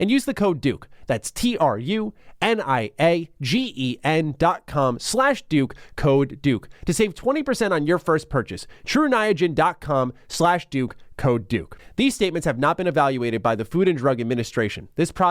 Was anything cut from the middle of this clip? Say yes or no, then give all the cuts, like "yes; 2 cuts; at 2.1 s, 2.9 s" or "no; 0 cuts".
yes; 1 cut; at 11.8 s